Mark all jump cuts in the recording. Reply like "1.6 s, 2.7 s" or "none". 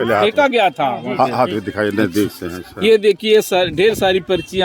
none